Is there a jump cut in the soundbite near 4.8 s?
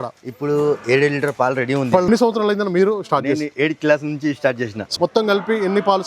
yes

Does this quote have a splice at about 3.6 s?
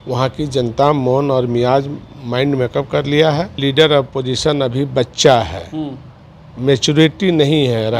yes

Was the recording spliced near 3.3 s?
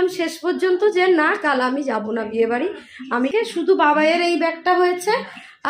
yes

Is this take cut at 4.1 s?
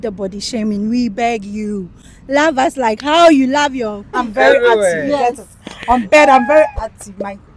yes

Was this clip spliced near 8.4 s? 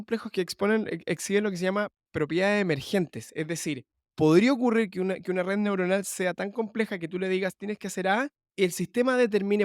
yes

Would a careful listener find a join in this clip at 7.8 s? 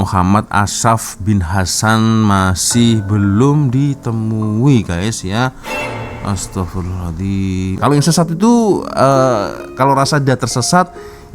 yes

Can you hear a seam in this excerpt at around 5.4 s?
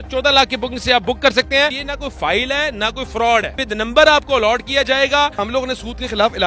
yes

